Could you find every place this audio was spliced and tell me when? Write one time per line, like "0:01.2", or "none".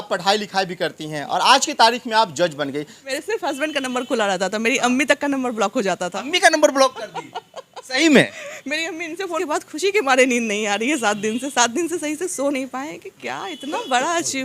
0:03.1
0:09.4

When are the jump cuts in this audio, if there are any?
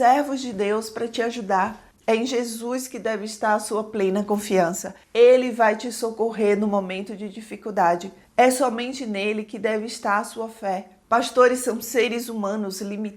0:01.8
0:08.1

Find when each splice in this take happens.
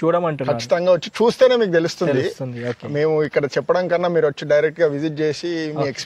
none

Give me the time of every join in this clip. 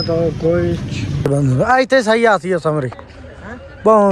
0:01.2

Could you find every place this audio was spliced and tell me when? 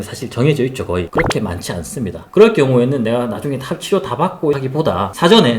0:01.1

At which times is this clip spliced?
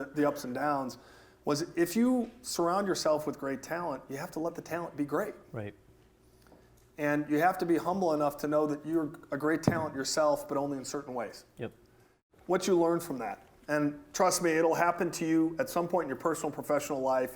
0:12.3

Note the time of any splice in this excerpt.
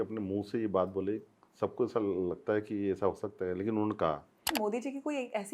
0:04.5

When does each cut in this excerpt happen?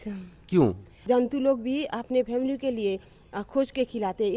0:01.0

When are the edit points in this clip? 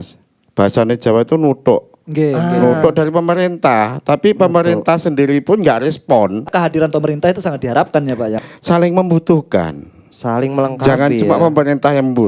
0:06.5
0:08.3

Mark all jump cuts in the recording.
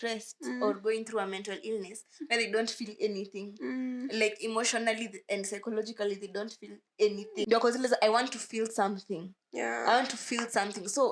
0:07.5

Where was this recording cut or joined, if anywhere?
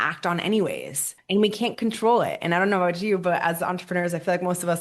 0:01.2

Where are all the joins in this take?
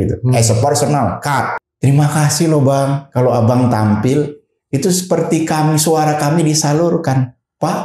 0:01.6

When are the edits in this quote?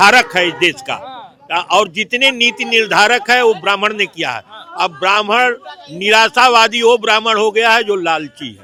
none

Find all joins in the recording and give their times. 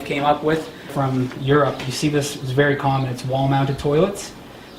0:00.9

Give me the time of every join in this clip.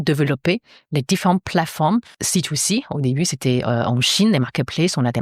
0:02.2

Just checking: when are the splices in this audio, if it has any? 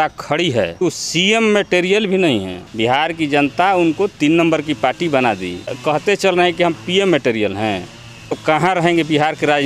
0:00.8
0:02.6
0:05.8
0:08.3

